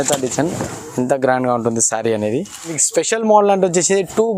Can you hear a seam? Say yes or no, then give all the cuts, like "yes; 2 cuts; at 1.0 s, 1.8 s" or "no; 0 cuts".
yes; 1 cut; at 2.8 s